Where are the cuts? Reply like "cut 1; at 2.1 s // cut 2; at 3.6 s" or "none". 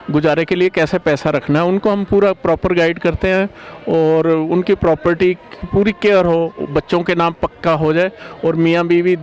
none